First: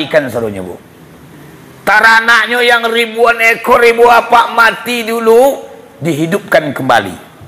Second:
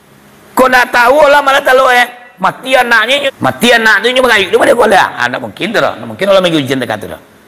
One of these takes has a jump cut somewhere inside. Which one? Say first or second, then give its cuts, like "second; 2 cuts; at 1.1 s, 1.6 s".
second; 1 cut; at 3.3 s